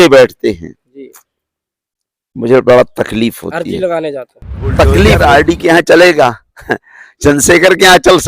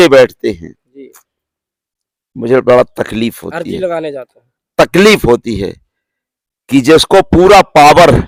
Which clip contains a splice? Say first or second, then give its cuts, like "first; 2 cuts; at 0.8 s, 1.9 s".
first; 1 cut; at 5.2 s